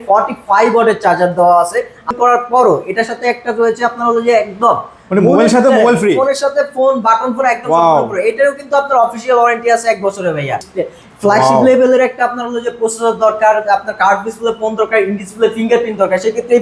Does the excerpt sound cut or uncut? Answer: cut